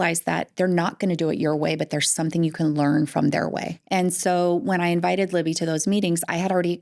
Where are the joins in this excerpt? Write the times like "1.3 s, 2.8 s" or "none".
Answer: 3.7 s